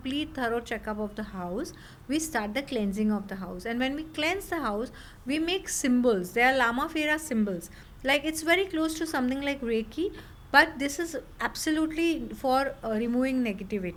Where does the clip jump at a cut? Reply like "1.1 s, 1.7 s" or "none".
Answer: none